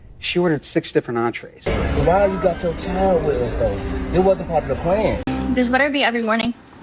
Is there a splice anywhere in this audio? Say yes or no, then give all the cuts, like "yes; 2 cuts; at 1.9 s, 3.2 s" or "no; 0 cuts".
yes; 2 cuts; at 1.5 s, 5.2 s